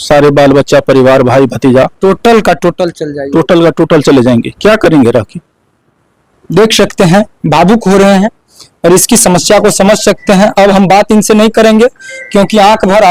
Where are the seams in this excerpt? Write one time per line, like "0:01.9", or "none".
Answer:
none